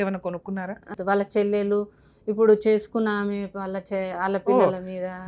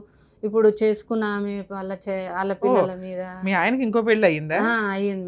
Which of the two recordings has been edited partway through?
first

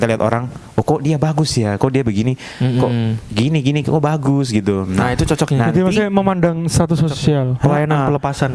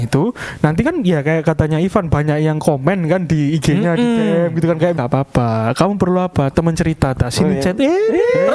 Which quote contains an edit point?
second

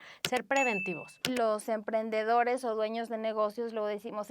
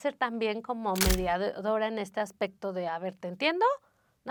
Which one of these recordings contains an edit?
first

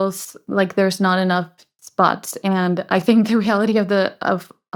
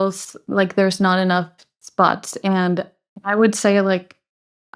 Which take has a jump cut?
second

